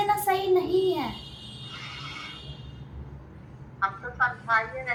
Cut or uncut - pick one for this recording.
uncut